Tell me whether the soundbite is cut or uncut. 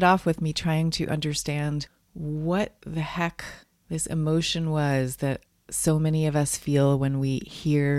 uncut